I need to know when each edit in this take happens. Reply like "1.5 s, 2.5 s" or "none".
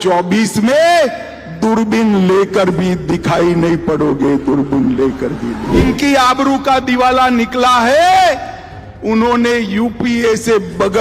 5.8 s